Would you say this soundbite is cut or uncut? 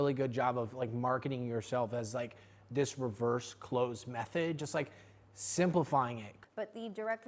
cut